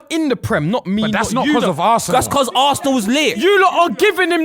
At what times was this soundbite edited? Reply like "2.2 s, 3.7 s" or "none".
2.1 s, 3.4 s